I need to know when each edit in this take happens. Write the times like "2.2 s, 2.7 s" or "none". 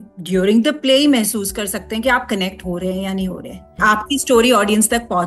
3.8 s